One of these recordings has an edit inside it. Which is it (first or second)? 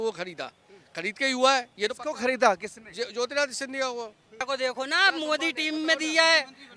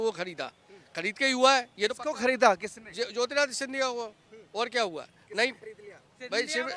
first